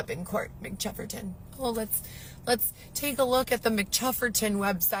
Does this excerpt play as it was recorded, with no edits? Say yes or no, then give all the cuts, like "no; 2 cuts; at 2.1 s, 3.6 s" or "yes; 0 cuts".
yes; 0 cuts